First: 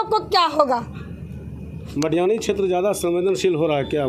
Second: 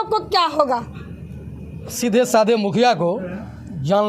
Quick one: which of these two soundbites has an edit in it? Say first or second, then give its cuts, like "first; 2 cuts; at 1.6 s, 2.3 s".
second; 1 cut; at 1.9 s